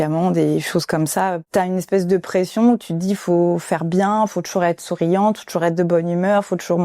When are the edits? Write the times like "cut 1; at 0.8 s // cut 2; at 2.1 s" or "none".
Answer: cut 1; at 1.4 s